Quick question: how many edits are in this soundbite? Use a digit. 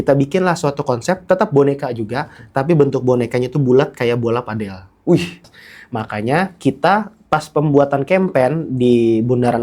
1